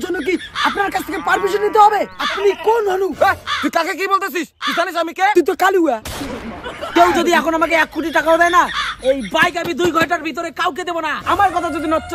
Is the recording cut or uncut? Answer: cut